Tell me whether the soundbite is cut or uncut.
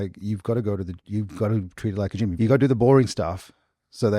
cut